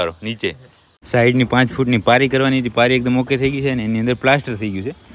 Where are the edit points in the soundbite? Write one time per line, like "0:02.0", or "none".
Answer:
0:00.9